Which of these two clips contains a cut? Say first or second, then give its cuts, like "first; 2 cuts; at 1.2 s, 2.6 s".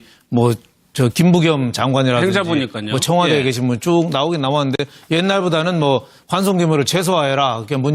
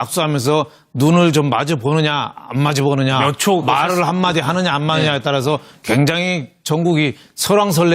second; 1 cut; at 1.3 s